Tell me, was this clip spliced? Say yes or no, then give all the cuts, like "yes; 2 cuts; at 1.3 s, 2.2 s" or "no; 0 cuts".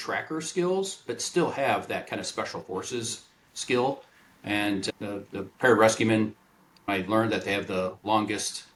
no; 0 cuts